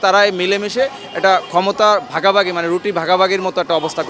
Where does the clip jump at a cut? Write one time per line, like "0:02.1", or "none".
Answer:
none

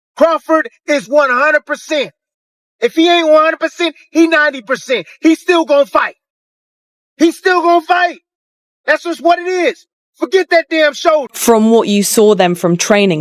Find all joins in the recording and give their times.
0:11.3

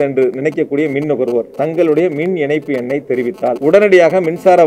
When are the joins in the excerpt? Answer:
0:03.6

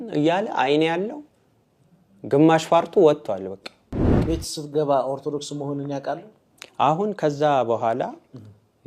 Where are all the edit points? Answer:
0:04.1

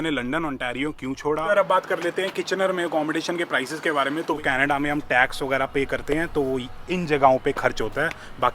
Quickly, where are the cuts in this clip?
0:01.4
0:04.4

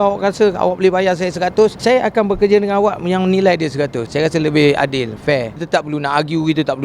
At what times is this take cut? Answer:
0:05.6

